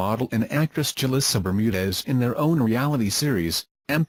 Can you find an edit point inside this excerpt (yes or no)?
no